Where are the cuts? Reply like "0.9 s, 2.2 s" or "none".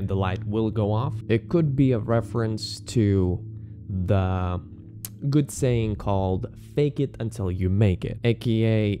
1.1 s, 8.1 s